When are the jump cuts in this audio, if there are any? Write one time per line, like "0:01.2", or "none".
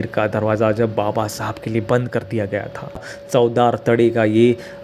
0:03.1